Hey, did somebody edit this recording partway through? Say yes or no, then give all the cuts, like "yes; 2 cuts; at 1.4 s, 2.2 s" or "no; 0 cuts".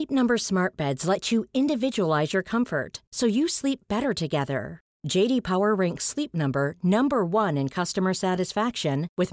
no; 0 cuts